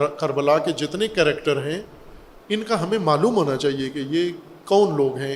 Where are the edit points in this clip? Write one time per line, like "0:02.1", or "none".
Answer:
none